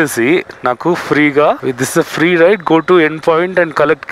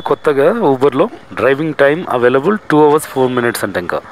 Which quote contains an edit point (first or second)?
first